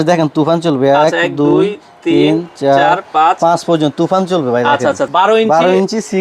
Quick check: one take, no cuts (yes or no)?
no